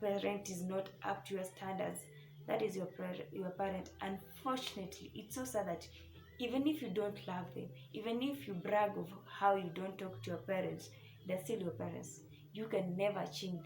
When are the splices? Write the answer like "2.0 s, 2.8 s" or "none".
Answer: none